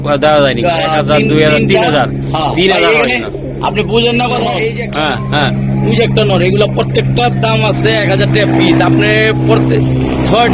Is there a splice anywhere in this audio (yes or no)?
yes